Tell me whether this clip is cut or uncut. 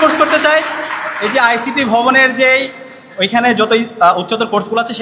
uncut